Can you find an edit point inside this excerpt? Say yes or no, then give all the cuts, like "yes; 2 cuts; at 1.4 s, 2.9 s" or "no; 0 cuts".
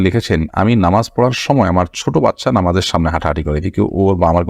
no; 0 cuts